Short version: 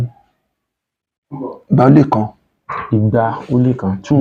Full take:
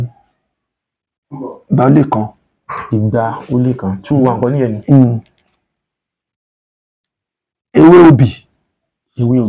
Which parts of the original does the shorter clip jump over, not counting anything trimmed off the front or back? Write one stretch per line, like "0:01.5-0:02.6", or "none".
none